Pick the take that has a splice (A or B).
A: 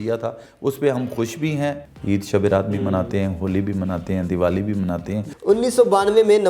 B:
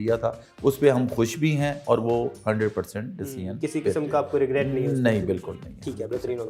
A